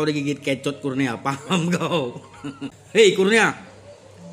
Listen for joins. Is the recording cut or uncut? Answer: cut